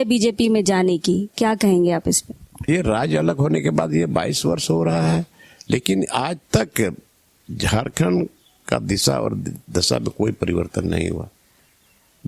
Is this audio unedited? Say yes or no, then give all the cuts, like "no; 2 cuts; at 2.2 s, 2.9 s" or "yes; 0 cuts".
no; 1 cut; at 2.7 s